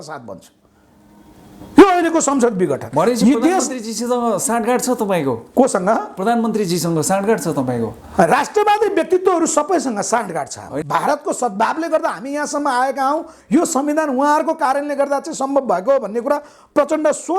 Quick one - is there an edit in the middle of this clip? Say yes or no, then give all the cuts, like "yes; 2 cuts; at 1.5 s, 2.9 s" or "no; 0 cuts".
yes; 1 cut; at 10.7 s